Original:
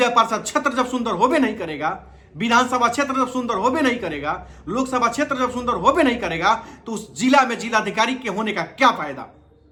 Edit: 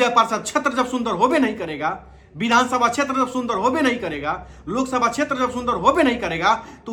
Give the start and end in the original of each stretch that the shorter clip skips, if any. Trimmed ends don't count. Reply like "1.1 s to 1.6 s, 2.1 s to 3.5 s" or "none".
none